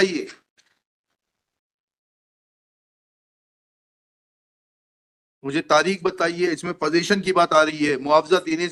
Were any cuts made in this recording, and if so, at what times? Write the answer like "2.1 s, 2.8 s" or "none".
none